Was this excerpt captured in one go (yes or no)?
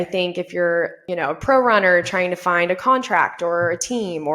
no